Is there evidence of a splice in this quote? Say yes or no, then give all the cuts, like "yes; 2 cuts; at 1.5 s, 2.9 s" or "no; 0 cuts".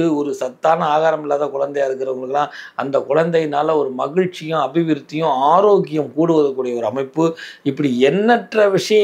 no; 0 cuts